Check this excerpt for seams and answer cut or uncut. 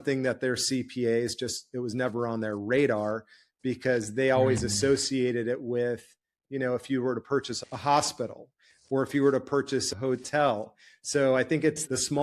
cut